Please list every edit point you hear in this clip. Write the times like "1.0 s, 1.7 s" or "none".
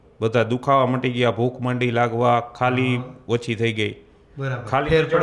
none